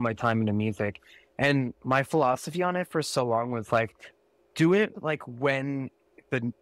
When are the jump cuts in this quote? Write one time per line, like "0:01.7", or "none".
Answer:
none